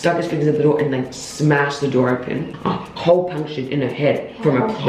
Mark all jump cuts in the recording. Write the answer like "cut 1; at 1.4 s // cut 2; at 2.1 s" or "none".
cut 1; at 2.5 s